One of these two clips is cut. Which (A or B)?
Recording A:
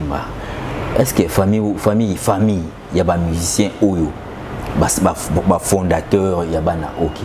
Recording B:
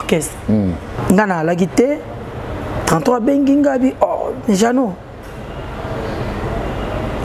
B